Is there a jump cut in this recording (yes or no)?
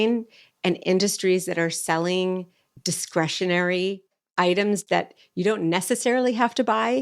yes